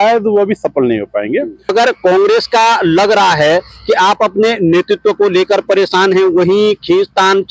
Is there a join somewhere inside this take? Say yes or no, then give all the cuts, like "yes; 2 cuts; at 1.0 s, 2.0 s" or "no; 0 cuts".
yes; 1 cut; at 1.7 s